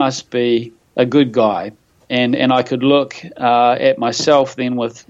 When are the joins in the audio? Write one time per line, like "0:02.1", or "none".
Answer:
0:01.9